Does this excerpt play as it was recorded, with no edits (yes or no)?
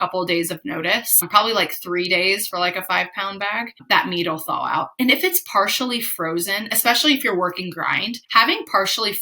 no